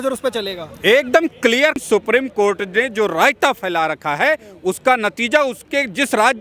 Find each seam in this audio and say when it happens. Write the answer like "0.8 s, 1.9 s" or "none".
1.8 s